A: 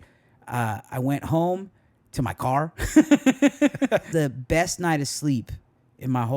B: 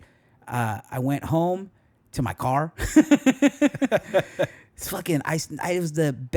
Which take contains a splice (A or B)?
A